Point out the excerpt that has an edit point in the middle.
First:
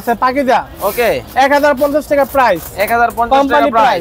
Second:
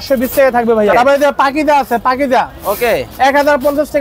second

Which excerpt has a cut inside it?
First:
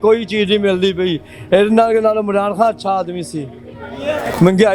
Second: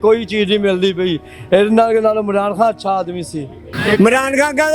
second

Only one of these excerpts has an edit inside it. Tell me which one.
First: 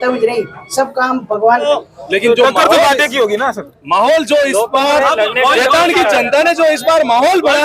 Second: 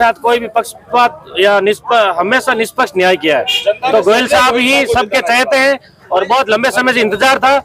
first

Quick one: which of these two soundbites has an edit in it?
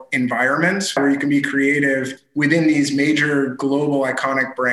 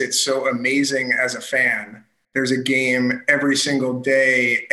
first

